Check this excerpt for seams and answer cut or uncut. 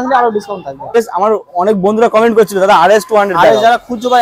cut